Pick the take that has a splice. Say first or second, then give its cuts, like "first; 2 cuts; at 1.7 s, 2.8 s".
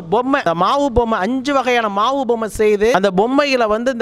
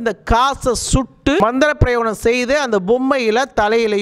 first; 1 cut; at 2.9 s